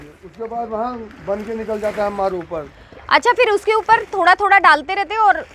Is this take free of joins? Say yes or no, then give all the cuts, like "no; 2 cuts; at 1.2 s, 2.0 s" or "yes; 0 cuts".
yes; 0 cuts